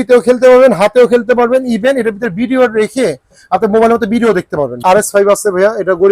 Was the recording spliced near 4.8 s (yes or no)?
yes